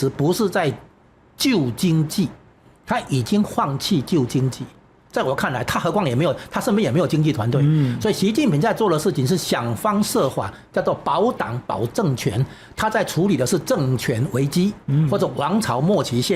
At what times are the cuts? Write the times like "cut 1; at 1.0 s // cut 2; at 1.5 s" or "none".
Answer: none